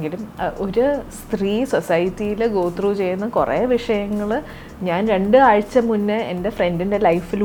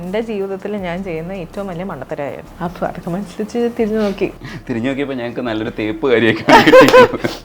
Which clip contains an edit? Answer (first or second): second